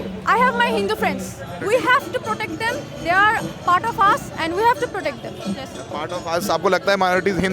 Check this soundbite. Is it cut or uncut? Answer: cut